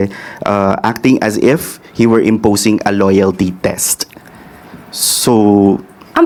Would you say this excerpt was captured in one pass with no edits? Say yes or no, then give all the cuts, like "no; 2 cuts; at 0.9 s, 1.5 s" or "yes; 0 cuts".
yes; 0 cuts